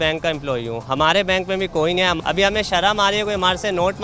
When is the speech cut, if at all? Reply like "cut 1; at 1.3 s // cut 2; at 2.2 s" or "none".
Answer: cut 1; at 2.2 s